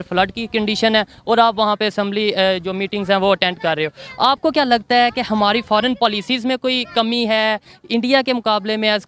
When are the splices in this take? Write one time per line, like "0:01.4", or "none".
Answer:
none